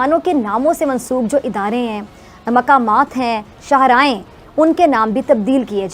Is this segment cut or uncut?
uncut